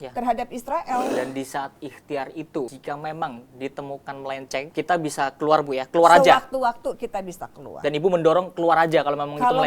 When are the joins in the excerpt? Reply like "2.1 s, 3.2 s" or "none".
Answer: 1.1 s, 2.8 s, 4.7 s

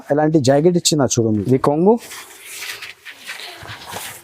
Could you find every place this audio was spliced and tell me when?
1.4 s

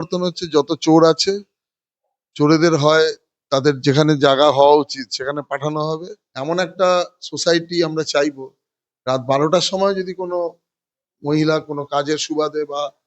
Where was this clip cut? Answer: 6.3 s

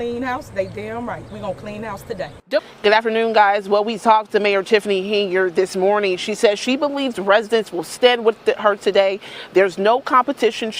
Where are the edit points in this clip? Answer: 2.3 s

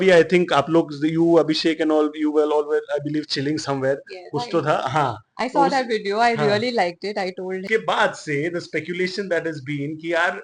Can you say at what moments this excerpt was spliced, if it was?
7.6 s

